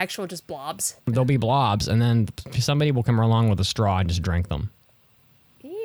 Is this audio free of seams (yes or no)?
no